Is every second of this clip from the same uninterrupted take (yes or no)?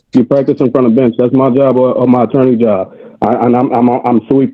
yes